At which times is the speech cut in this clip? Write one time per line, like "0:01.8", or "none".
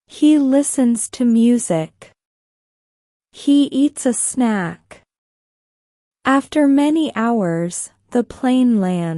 none